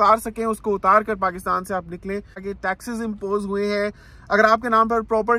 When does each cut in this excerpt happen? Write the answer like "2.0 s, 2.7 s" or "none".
2.4 s